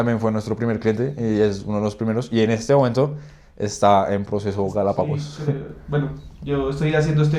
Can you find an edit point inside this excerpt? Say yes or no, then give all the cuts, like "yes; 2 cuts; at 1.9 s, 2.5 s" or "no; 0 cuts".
no; 0 cuts